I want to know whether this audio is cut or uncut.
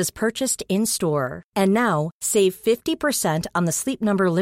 uncut